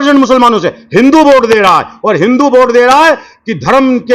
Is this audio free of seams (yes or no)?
yes